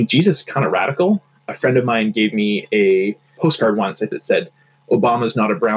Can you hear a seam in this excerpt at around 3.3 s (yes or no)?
yes